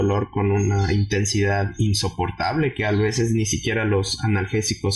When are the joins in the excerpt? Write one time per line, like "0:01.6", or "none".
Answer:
none